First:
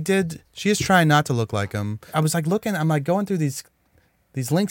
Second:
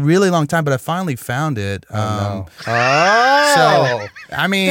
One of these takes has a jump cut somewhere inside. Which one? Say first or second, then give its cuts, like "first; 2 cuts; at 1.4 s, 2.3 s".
first; 1 cut; at 2.1 s